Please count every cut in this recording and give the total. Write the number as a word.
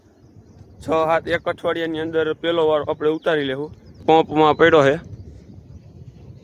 one